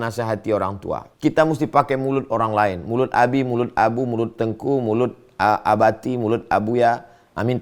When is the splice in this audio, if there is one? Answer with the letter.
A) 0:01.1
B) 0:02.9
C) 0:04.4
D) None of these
A